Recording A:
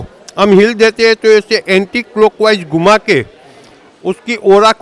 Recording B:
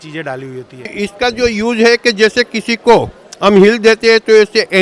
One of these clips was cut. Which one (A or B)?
B